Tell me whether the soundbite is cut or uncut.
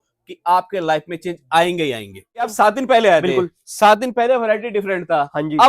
cut